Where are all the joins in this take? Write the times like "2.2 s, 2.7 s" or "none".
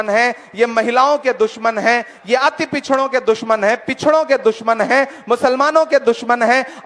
none